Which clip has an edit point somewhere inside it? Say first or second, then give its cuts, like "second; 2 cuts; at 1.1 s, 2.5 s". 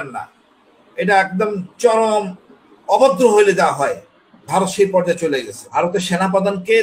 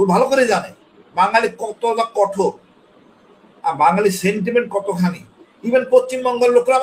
first; 1 cut; at 5.7 s